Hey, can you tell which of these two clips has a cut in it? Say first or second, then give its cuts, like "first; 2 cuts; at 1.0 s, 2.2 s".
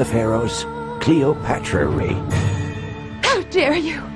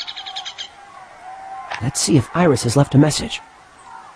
second; 1 cut; at 2.4 s